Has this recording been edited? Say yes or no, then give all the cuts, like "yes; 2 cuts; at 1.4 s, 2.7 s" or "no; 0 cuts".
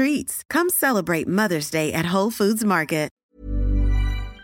yes; 1 cut; at 3.2 s